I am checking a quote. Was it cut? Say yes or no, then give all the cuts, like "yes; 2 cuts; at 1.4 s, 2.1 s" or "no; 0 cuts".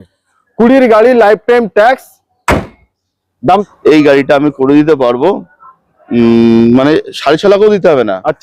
yes; 1 cut; at 3.6 s